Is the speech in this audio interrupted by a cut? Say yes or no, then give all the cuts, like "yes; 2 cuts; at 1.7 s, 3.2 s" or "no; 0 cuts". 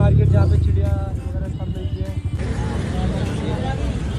yes; 1 cut; at 2.3 s